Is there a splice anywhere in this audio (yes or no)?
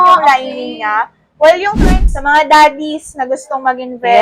yes